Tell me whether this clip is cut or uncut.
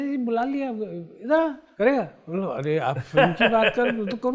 cut